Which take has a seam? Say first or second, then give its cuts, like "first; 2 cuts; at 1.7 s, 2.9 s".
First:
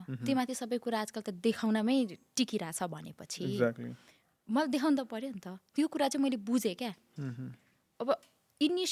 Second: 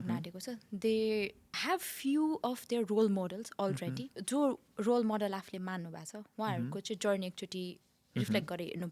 second; 2 cuts; at 1.5 s, 4.1 s